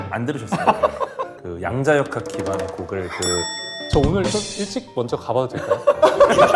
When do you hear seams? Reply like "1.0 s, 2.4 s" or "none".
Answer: 1.3 s